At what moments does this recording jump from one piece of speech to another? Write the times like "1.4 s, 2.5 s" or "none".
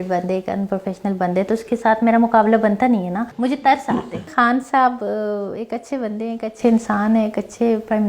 3.2 s, 4.3 s

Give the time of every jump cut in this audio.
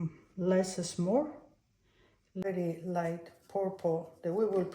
2.4 s

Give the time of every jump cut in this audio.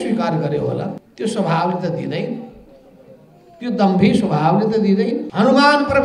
1.0 s, 5.3 s

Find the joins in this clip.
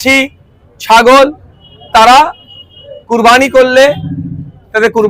none

